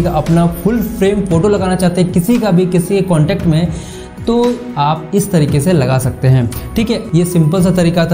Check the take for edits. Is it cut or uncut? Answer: cut